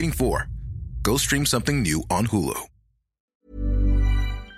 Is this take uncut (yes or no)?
no